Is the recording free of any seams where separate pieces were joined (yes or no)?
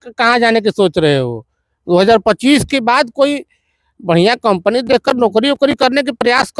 yes